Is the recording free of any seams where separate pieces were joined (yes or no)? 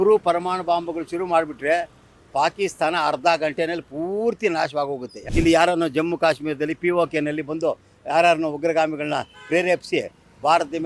no